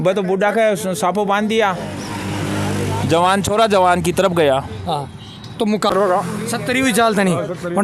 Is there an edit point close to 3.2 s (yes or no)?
no